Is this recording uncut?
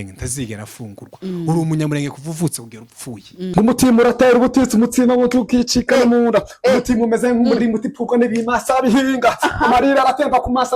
no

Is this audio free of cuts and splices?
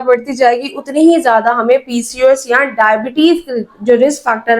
yes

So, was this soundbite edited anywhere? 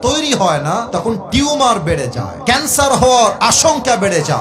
yes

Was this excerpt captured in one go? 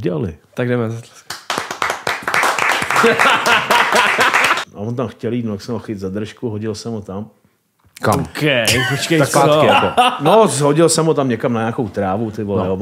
no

